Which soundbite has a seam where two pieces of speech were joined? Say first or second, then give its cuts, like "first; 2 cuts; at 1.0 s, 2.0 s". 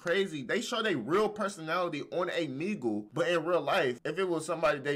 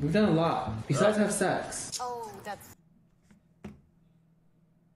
first; 2 cuts; at 3.1 s, 4.0 s